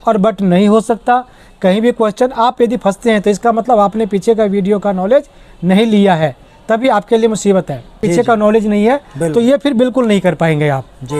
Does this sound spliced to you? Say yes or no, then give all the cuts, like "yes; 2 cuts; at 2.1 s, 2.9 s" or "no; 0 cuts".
no; 0 cuts